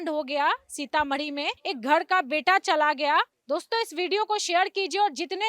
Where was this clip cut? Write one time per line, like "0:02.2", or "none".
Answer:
0:01.6
0:03.4